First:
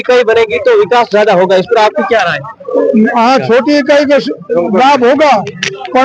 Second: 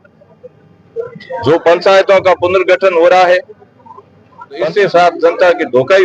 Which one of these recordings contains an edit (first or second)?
second